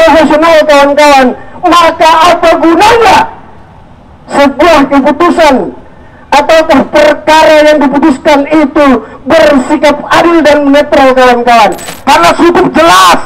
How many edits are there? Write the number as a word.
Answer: one